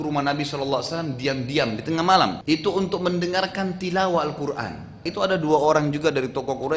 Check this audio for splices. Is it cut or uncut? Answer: cut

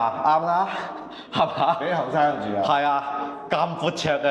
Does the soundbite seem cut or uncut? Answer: uncut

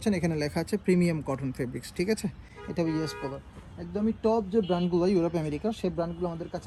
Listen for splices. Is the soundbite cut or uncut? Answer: uncut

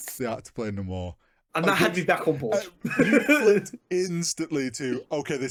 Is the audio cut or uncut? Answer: uncut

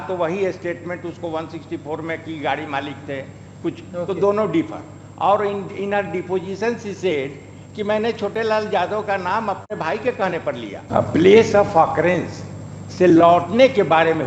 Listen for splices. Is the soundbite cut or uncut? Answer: cut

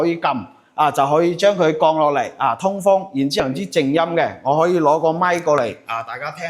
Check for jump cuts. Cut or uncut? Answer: cut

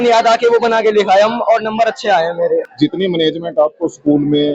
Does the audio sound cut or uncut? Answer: cut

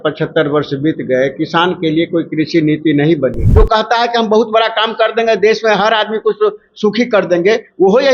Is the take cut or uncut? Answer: cut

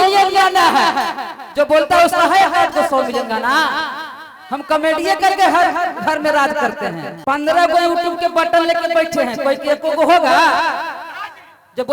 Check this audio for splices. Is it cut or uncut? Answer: cut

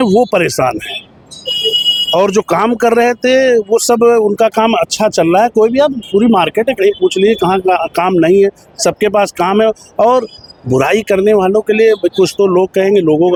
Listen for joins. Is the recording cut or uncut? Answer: uncut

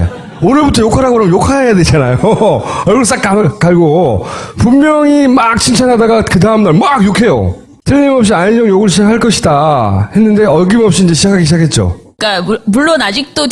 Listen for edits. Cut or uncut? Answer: uncut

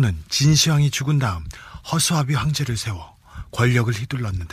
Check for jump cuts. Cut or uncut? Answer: uncut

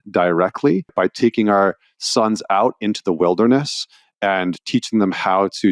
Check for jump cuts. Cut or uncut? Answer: cut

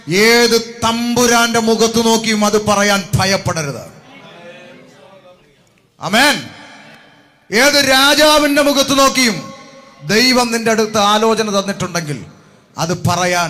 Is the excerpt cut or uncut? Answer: uncut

